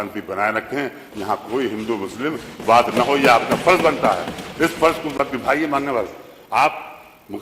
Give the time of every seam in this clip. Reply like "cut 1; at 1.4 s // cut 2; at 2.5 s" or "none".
none